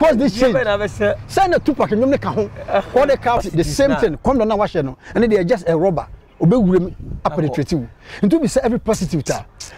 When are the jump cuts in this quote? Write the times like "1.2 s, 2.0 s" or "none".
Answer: 3.5 s